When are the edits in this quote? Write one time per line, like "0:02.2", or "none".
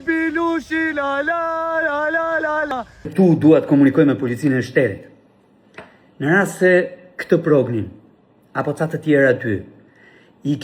0:03.1